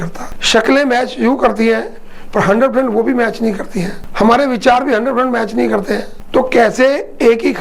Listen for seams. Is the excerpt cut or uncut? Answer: uncut